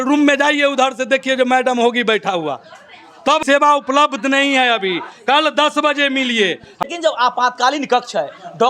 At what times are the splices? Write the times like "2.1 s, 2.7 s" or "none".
3.4 s, 6.8 s